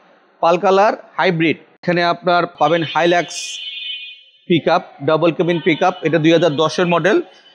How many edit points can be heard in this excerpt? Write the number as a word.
one